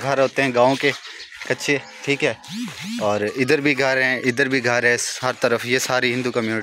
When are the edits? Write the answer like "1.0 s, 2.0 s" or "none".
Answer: none

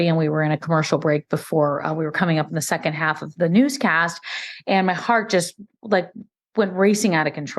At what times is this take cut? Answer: 3.3 s

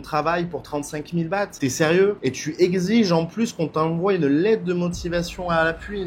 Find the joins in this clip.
none

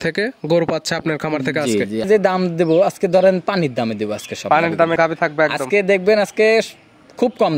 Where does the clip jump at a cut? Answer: 2.1 s

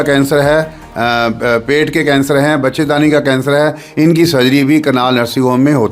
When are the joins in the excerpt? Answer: none

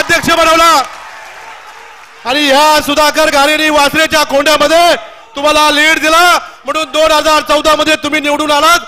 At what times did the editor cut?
none

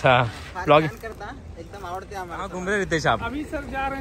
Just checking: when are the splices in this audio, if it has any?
2.5 s

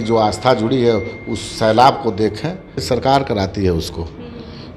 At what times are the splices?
2.8 s

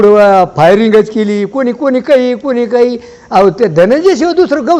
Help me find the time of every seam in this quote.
none

